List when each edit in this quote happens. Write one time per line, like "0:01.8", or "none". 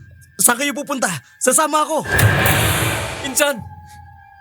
0:02.1
0:03.2

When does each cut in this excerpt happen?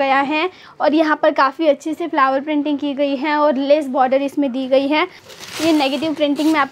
0:05.2

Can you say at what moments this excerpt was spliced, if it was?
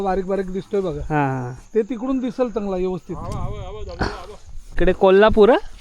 0:04.8

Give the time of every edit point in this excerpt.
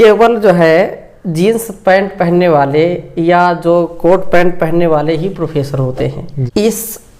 0:06.3

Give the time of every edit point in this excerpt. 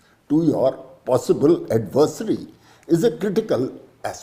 none

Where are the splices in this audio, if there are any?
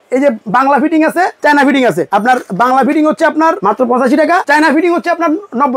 0:01.3
0:02.0
0:03.6
0:04.4

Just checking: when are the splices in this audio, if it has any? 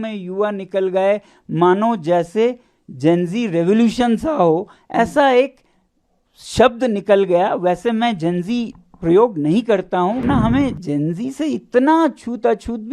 0:10.2

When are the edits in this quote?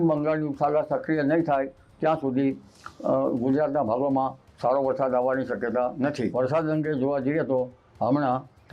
0:06.3

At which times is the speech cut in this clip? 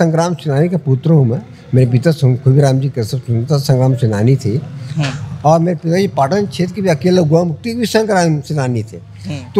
none

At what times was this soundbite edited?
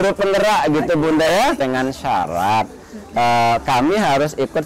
0:01.6

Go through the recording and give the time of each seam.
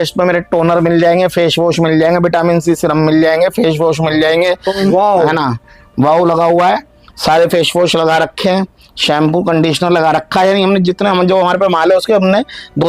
0:04.7

